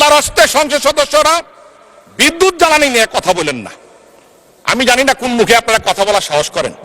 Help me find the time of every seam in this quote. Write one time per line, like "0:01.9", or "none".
none